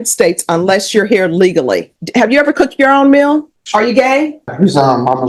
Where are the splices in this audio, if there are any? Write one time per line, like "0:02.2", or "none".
0:02.0
0:03.6
0:04.5